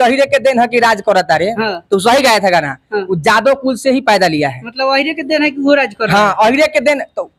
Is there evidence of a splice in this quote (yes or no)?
no